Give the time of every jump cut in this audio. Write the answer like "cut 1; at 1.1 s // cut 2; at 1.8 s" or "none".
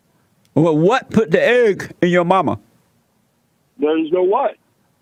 none

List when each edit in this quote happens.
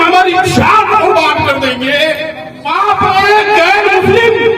cut 1; at 2.7 s

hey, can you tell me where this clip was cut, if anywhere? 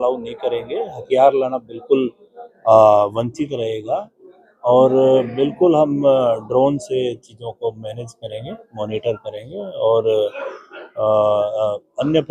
none

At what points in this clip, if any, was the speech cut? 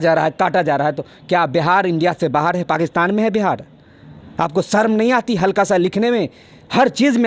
none

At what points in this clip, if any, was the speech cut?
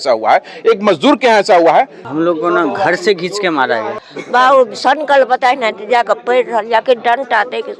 cut 1; at 2.1 s // cut 2; at 4.0 s

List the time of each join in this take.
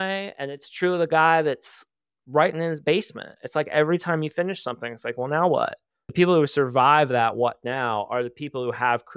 cut 1; at 6.1 s

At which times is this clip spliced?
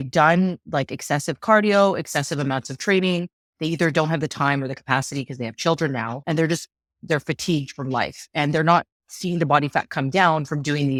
none

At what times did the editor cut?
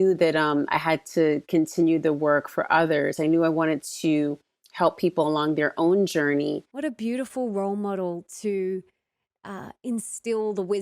cut 1; at 6.7 s

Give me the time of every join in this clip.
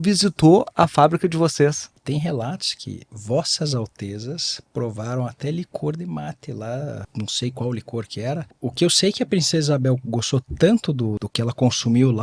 cut 1; at 2.0 s // cut 2; at 7.0 s // cut 3; at 8.5 s // cut 4; at 11.2 s

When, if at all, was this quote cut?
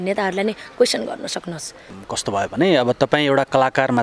none

